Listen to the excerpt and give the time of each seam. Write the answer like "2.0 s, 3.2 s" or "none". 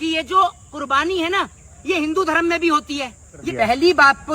3.4 s

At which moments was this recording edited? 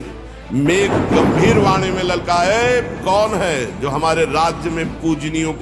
none

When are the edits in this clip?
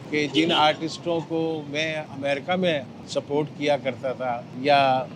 2.1 s

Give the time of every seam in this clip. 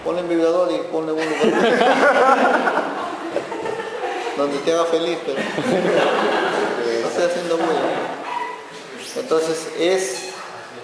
none

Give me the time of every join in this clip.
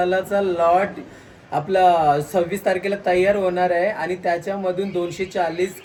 none

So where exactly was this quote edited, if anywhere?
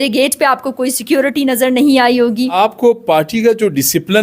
2.5 s

